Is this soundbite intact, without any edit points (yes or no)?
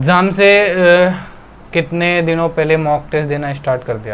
yes